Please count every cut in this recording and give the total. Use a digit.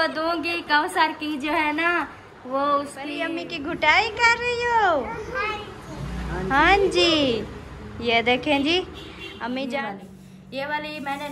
2